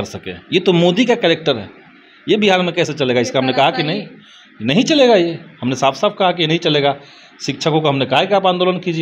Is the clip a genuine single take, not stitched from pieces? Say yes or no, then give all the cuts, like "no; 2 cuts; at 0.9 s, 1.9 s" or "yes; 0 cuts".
yes; 0 cuts